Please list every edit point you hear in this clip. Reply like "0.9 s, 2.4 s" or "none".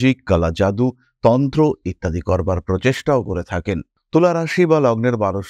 none